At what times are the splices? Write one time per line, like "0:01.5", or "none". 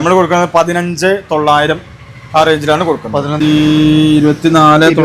0:03.3